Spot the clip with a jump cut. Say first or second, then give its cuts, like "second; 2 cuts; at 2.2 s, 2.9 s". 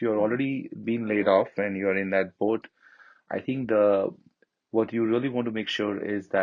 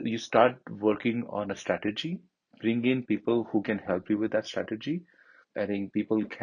second; 1 cut; at 5.2 s